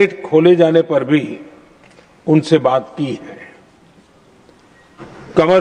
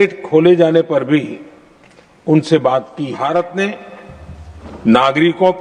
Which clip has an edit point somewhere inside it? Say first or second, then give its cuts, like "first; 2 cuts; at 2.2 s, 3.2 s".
second; 1 cut; at 3.2 s